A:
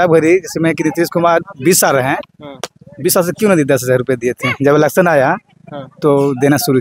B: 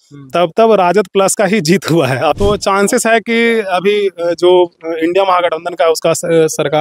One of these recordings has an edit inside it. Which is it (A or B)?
B